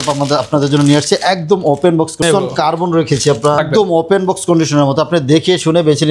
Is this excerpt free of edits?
no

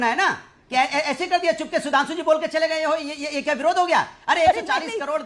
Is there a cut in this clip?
no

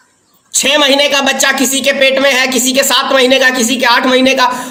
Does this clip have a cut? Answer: no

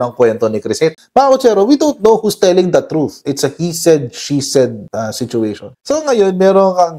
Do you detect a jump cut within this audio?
yes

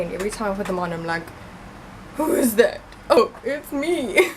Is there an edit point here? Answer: yes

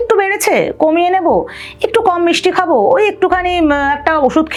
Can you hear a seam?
no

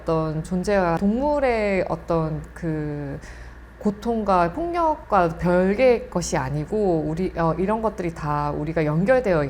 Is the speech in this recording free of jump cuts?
no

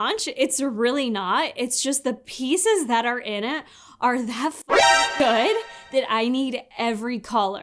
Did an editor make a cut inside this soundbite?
no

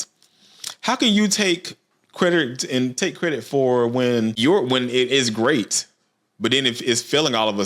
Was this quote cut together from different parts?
yes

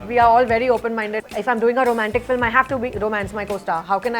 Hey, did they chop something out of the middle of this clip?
yes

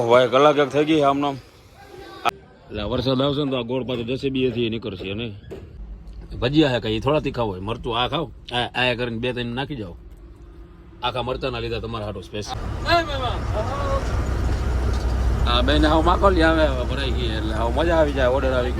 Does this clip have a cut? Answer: yes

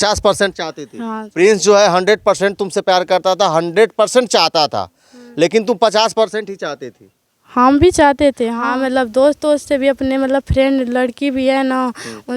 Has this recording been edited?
yes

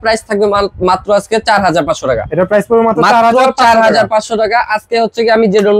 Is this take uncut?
yes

